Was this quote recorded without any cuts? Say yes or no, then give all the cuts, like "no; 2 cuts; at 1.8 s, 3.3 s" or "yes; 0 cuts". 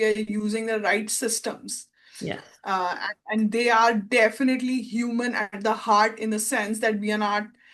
yes; 0 cuts